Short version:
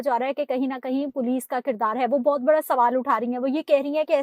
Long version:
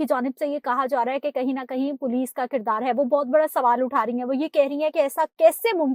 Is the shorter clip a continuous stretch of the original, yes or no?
yes